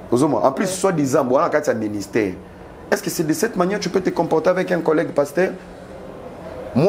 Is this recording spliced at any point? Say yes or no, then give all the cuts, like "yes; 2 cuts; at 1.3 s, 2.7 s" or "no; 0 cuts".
no; 0 cuts